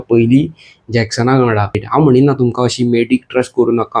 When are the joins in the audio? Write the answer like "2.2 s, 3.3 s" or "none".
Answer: 1.8 s